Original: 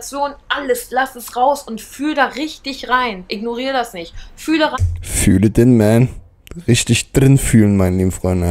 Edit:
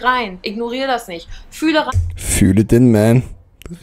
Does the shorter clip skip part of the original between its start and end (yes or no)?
no